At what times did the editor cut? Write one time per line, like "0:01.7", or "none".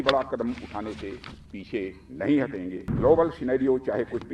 0:02.8